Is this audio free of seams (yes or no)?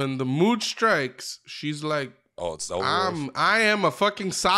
yes